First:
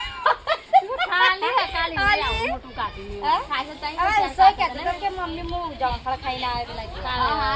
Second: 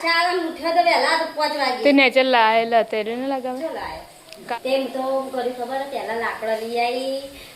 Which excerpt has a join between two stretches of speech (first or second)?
second